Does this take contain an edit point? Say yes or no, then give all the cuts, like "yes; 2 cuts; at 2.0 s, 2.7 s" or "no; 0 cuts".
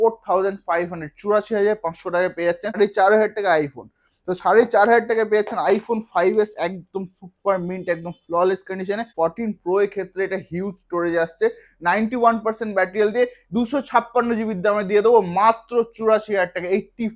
yes; 2 cuts; at 2.7 s, 9.1 s